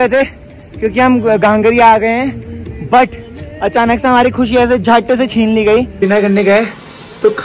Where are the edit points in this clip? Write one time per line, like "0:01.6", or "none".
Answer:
0:06.0